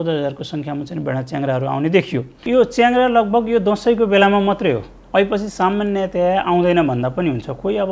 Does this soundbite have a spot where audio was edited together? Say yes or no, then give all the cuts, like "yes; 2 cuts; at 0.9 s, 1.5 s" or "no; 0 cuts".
yes; 1 cut; at 2.3 s